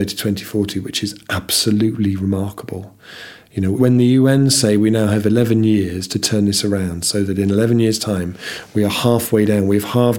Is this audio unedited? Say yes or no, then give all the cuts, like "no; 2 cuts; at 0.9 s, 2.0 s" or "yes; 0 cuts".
no; 1 cut; at 3.8 s